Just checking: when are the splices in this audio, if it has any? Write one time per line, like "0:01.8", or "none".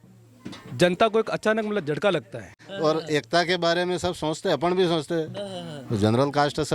0:02.6